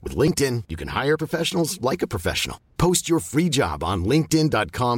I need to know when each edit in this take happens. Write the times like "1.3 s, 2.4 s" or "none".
none